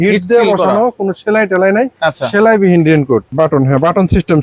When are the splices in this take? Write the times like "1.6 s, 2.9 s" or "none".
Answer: 3.3 s